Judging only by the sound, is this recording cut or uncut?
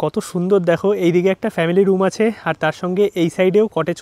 uncut